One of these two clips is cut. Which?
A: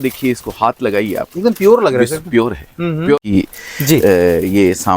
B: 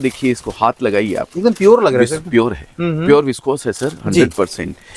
A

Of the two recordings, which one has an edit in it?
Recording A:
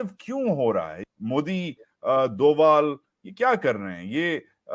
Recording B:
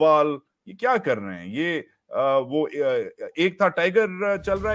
A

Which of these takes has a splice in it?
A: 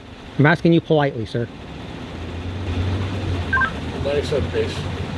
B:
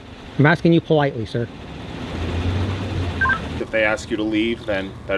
B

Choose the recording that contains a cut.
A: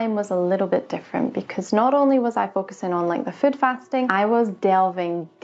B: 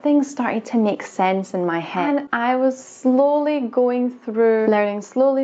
B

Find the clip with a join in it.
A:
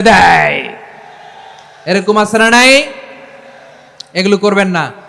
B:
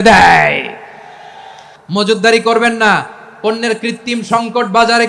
B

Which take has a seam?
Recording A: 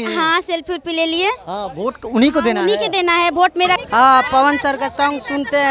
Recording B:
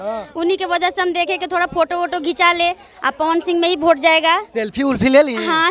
A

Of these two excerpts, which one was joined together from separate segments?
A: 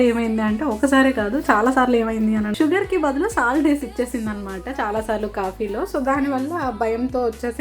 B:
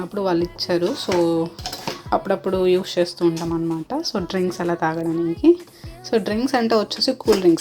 A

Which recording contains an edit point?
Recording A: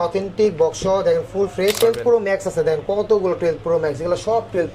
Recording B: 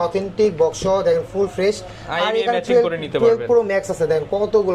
A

